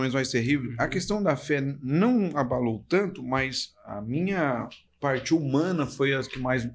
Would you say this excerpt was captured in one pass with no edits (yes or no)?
yes